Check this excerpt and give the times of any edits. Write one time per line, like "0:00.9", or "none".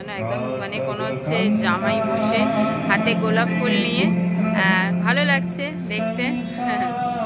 none